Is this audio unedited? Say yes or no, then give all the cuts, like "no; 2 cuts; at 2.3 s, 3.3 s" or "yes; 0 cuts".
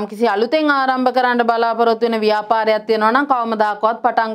yes; 0 cuts